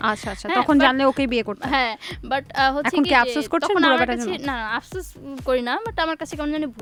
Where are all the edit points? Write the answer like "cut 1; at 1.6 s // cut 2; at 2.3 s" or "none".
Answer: none